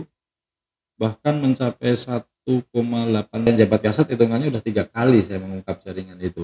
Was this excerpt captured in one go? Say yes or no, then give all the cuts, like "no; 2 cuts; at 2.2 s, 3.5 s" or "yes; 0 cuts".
no; 1 cut; at 3.5 s